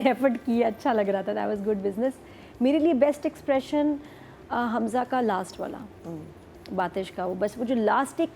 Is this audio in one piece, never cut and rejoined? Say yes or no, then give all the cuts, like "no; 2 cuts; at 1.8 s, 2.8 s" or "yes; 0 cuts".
yes; 0 cuts